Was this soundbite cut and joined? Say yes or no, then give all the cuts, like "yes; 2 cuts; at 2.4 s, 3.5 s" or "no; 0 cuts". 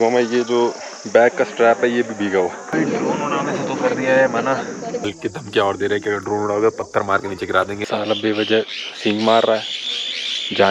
yes; 3 cuts; at 2.7 s, 5.1 s, 7.8 s